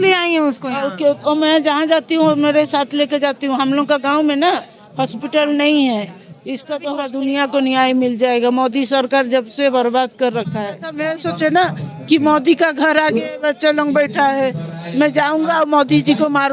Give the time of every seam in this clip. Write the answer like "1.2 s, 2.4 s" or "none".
6.5 s, 11.0 s